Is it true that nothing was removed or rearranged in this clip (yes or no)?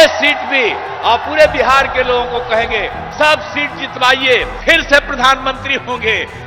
no